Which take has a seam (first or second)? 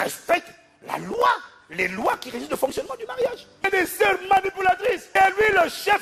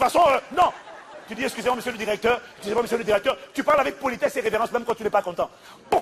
first